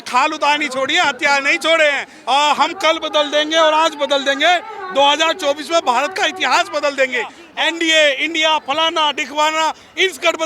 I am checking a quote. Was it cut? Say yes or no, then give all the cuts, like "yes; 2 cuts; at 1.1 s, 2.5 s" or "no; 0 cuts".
yes; 2 cuts; at 2.1 s, 7.4 s